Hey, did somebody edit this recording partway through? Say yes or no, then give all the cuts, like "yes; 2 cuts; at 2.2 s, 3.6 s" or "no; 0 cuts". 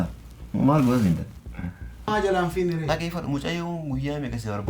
yes; 1 cut; at 2.1 s